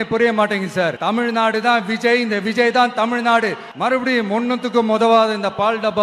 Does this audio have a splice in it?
yes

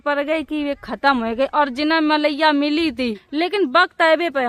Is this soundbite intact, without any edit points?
no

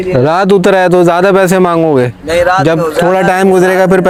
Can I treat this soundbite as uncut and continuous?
yes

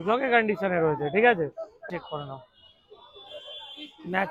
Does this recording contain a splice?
yes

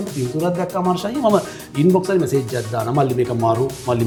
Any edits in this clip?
no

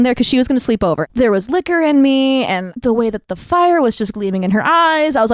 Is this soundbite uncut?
no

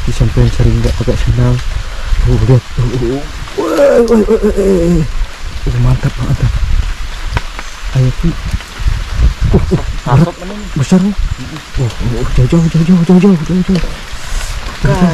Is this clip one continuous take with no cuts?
yes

